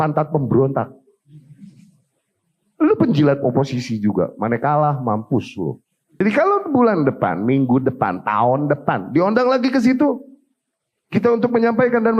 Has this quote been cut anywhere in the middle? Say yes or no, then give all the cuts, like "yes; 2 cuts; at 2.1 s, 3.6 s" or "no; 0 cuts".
yes; 1 cut; at 6.2 s